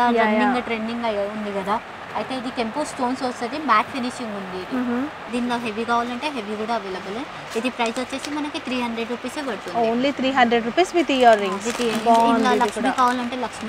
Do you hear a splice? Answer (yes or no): yes